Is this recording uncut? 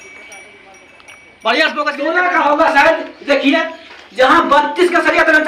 no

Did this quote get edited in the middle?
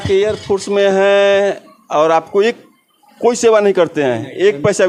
no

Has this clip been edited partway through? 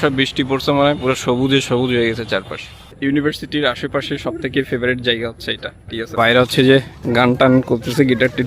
yes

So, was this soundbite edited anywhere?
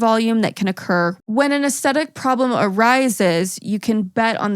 yes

